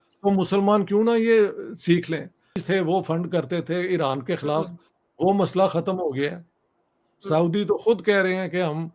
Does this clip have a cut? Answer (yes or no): yes